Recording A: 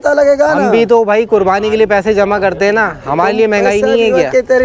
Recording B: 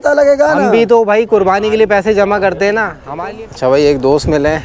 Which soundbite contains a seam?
B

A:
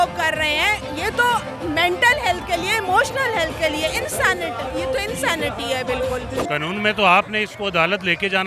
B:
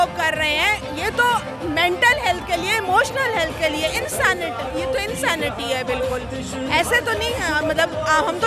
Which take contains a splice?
A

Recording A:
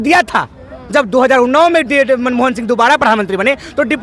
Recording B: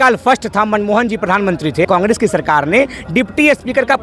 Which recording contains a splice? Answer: B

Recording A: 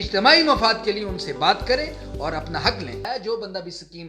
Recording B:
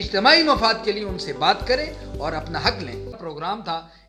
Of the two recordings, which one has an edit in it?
A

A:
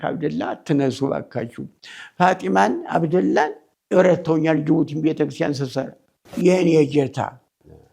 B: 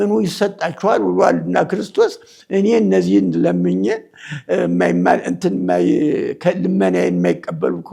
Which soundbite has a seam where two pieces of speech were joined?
A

